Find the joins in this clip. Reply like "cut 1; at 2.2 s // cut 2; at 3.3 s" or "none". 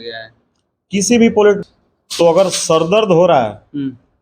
cut 1; at 1.6 s